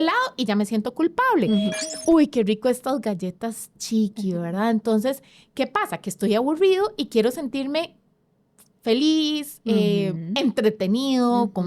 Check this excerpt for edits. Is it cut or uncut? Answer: cut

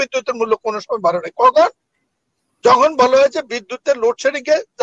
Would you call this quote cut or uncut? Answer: uncut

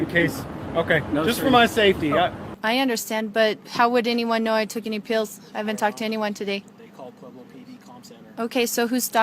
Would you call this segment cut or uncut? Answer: cut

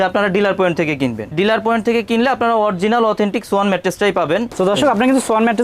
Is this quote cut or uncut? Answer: cut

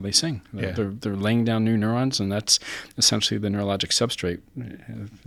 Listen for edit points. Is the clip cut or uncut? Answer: uncut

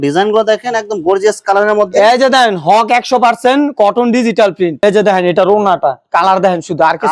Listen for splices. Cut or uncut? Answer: cut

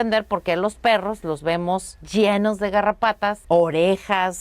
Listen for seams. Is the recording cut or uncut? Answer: cut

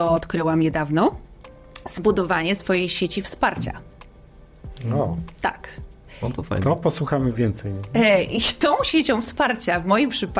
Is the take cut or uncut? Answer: uncut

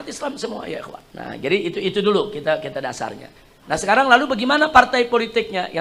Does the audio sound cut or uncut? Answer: uncut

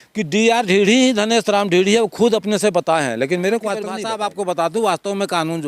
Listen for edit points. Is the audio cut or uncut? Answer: cut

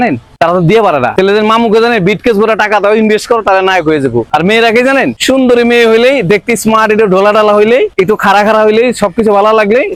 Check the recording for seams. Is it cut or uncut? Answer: uncut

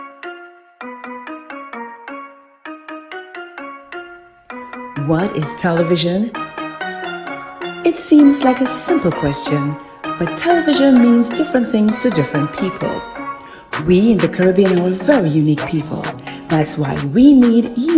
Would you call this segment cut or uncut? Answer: uncut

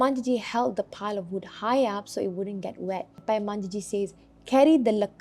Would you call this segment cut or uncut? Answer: cut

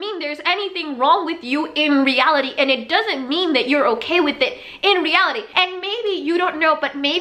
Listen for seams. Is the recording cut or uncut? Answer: cut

